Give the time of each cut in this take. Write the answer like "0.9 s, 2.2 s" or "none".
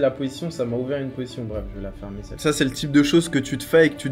2.4 s